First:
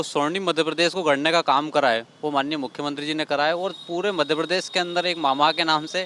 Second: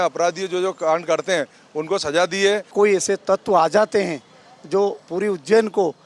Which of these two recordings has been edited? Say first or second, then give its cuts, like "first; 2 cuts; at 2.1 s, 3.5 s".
second; 1 cut; at 2.7 s